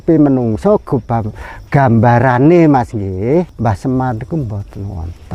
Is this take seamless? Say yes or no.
no